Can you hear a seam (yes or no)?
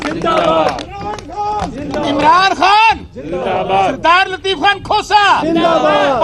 no